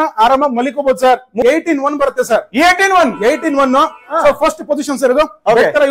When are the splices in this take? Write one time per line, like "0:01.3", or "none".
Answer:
0:01.4

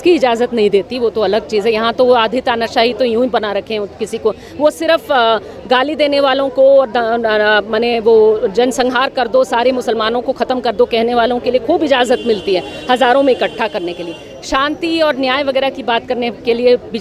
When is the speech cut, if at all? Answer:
none

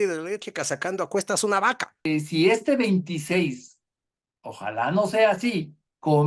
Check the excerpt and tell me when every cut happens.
0:02.1

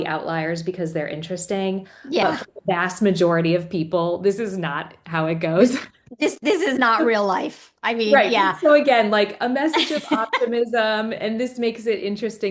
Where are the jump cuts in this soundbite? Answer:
none

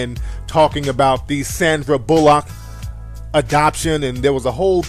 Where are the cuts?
none

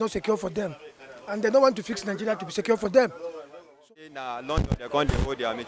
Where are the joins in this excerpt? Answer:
0:03.9

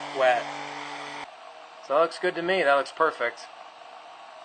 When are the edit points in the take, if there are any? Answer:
0:01.2

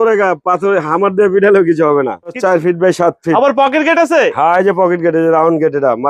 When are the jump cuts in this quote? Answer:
0:02.4

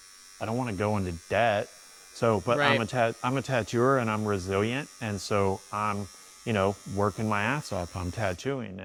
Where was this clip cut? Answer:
none

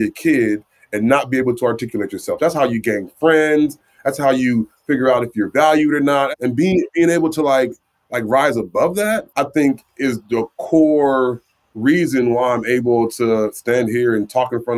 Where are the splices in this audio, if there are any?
0:06.3
0:09.2

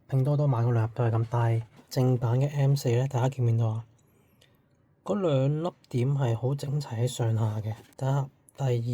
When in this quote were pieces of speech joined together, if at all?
0:01.7
0:07.8

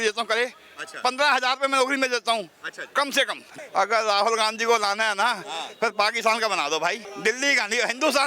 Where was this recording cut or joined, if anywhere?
0:03.5
0:07.1

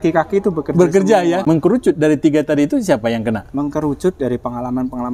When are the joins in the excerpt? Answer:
0:01.4

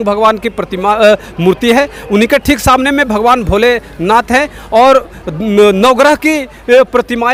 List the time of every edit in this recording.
none

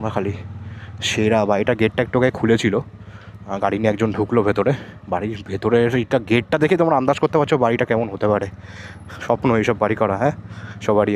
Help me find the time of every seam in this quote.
none

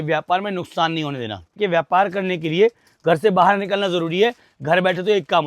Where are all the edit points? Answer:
0:01.6

